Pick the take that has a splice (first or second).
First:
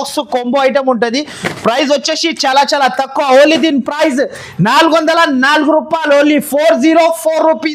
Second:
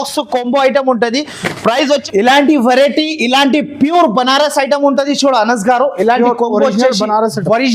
second